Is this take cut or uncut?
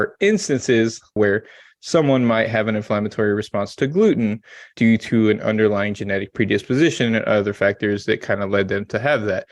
cut